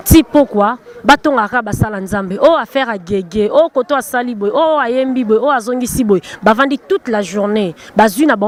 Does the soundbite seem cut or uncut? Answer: uncut